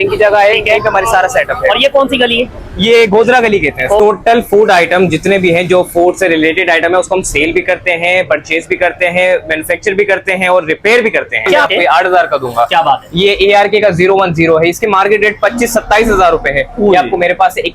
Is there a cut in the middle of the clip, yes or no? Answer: yes